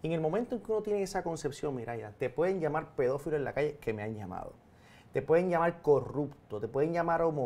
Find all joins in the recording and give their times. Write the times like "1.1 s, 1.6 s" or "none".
none